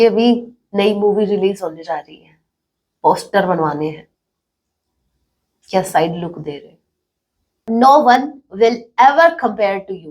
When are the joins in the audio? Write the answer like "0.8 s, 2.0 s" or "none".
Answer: 7.7 s